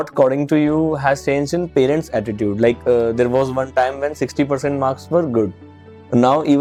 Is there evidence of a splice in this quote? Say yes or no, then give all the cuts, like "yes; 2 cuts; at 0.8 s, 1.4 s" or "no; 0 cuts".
no; 0 cuts